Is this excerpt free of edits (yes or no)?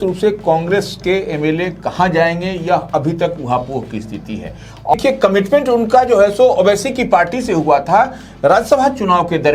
no